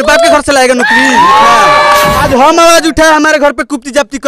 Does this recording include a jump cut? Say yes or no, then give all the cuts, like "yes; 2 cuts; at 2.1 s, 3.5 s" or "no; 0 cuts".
yes; 1 cut; at 2.1 s